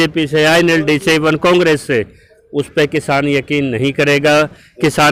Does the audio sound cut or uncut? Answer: uncut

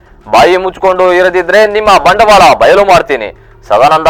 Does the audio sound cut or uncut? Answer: uncut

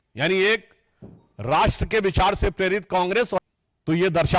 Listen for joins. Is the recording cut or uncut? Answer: cut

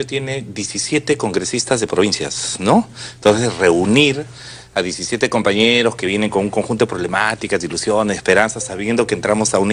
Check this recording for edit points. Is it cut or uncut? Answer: uncut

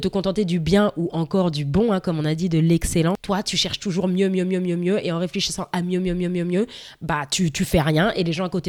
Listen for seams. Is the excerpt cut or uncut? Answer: uncut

